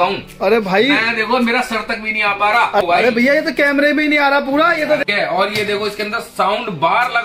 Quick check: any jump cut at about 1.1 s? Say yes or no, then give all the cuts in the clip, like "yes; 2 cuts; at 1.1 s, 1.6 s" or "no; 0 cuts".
no; 2 cuts; at 2.8 s, 5.0 s